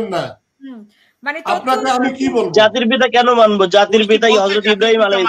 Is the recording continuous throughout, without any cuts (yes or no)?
yes